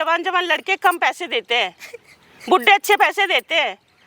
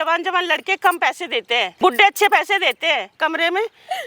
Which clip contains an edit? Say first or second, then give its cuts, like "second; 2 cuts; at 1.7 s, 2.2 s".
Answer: second; 2 cuts; at 1.7 s, 3.2 s